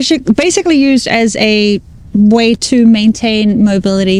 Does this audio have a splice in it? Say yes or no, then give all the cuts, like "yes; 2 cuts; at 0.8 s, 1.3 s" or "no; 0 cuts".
no; 0 cuts